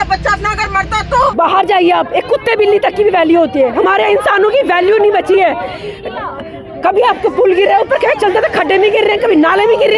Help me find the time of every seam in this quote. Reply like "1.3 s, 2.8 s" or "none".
1.3 s